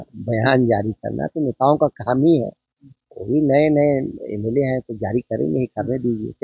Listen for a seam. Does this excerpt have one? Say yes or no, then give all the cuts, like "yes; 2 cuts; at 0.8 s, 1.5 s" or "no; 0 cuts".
no; 0 cuts